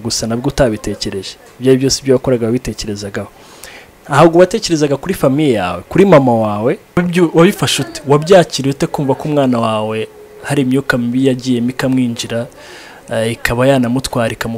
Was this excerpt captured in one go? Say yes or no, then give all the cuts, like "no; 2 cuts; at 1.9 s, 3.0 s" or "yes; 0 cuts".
no; 1 cut; at 7.0 s